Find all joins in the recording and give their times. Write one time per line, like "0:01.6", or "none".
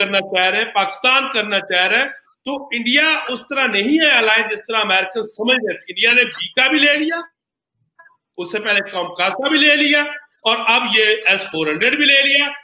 none